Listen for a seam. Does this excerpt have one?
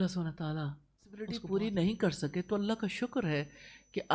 yes; 1 cut; at 1.4 s

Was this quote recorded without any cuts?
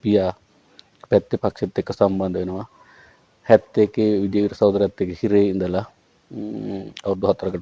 yes; 0 cuts

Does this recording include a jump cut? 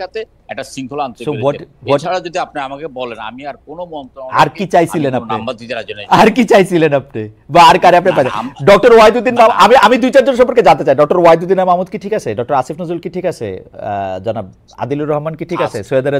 no; 0 cuts

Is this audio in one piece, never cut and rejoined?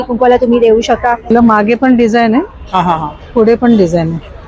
no; 1 cut; at 1.3 s

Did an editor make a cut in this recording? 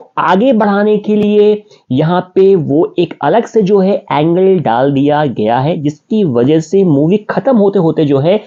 no; 0 cuts

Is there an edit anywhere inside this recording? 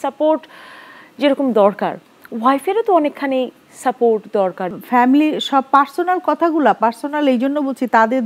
yes; 1 cut; at 4.7 s

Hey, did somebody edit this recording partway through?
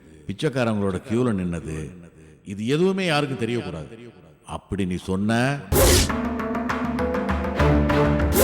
yes; 1 cut; at 5.7 s

